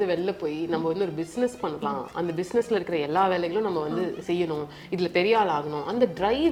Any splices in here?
no; 0 cuts

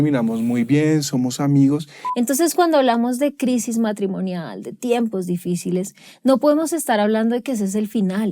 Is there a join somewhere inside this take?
yes; 1 cut; at 2.0 s

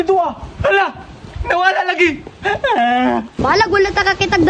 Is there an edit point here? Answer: yes; 1 cut; at 3.3 s

